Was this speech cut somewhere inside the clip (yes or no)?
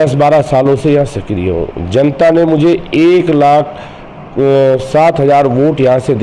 no